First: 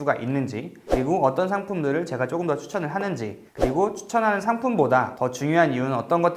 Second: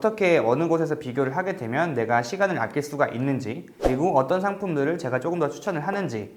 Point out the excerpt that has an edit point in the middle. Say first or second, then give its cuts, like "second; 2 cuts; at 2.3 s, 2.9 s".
first; 1 cut; at 5.1 s